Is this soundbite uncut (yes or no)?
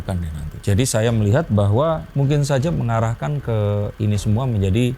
no